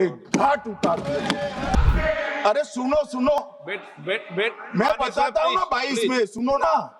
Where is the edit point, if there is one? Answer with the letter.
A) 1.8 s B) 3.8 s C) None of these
A